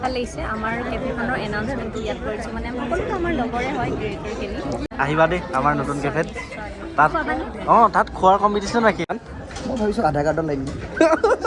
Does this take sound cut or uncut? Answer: cut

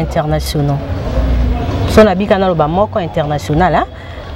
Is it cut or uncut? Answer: uncut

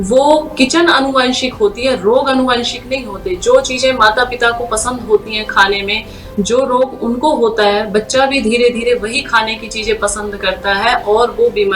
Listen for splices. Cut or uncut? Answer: uncut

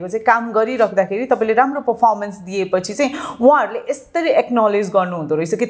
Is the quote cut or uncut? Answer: uncut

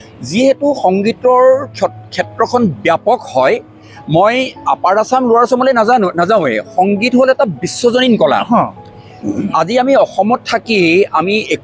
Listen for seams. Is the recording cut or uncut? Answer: uncut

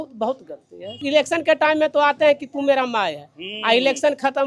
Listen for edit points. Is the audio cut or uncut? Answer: cut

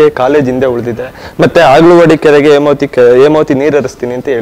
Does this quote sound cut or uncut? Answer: uncut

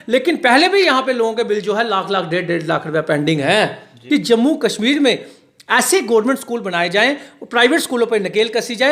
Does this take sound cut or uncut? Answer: cut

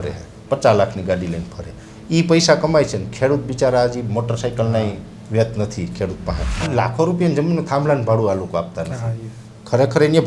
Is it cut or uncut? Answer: cut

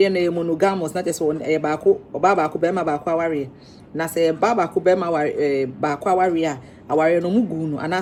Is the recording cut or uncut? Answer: uncut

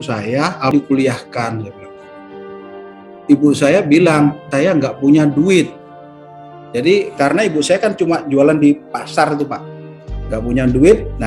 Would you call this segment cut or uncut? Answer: cut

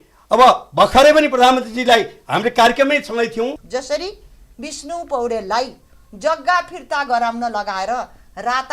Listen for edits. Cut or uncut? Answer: cut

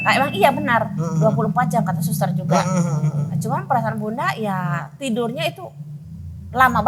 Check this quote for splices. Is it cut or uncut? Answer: uncut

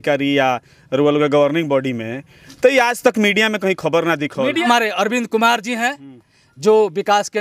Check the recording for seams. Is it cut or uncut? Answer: cut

